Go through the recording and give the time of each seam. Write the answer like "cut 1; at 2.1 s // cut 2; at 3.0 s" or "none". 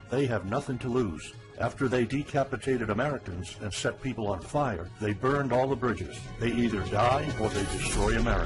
none